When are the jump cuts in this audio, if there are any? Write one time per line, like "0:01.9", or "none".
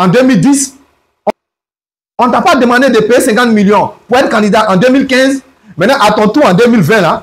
0:01.3